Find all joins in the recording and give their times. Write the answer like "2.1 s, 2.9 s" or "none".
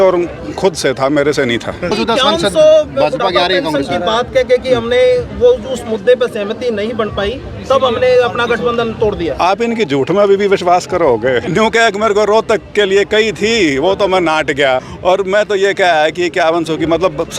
1.9 s, 11.5 s, 14.9 s